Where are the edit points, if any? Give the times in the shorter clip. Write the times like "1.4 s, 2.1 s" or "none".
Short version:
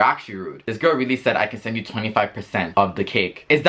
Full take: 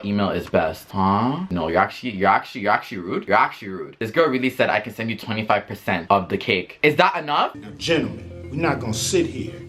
none